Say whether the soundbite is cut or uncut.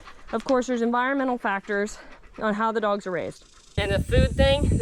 cut